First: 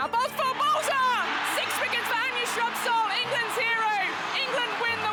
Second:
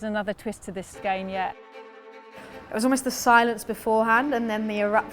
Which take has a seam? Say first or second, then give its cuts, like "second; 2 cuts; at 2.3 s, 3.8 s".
second; 2 cuts; at 0.9 s, 2.2 s